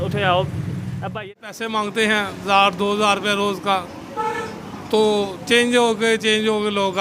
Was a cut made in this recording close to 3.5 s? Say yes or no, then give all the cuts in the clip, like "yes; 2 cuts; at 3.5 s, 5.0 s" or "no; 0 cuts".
no; 1 cut; at 1.1 s